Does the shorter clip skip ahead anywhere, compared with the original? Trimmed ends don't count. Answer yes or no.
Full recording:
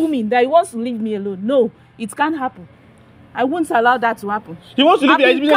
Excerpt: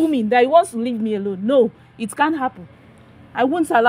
no